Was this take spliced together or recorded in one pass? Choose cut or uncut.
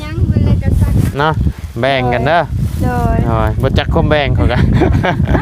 cut